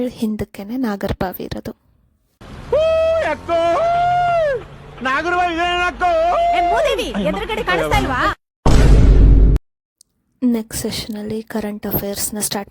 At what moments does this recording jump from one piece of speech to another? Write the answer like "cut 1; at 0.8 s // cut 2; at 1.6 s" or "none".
none